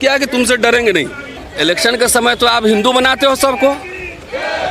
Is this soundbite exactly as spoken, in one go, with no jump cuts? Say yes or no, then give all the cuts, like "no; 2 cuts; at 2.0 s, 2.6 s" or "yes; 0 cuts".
no; 1 cut; at 1.0 s